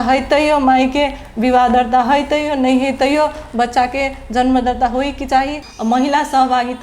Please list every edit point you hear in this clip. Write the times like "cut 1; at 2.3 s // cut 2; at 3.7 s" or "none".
cut 1; at 5.6 s